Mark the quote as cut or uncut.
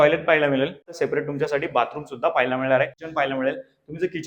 cut